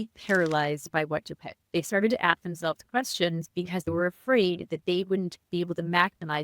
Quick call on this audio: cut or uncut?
cut